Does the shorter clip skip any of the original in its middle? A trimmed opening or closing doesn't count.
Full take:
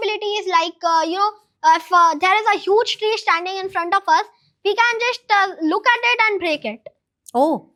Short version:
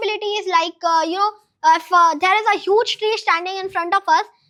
no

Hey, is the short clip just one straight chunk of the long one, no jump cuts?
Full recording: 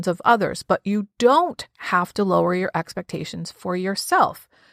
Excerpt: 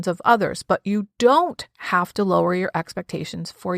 yes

